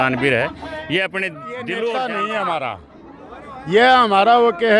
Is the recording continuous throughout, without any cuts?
no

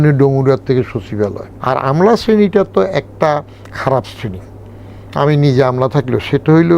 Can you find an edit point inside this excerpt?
yes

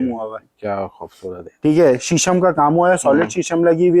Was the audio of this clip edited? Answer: no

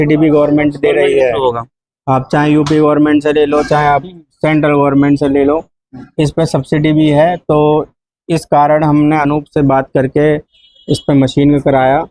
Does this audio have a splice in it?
no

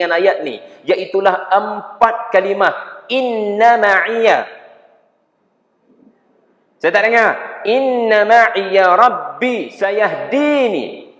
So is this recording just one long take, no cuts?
no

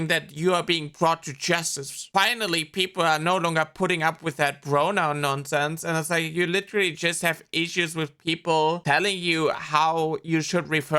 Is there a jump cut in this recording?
no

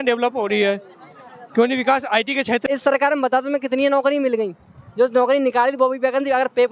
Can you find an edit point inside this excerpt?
yes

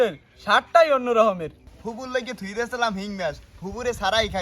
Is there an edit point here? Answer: yes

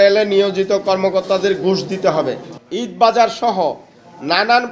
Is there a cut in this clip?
yes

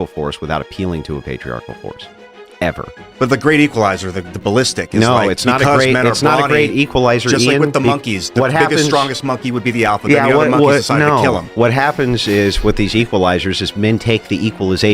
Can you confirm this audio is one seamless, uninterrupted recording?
no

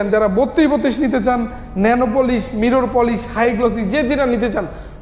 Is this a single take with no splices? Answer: yes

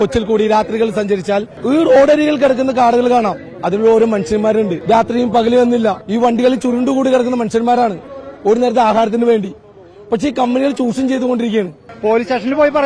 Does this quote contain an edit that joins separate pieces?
yes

